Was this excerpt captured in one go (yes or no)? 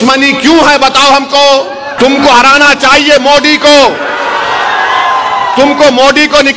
no